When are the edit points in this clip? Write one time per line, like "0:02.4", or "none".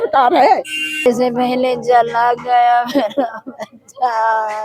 0:01.1